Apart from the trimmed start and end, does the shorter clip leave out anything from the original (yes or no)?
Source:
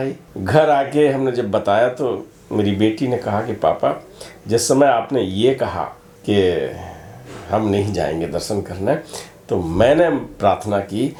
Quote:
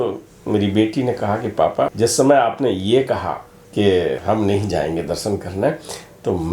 yes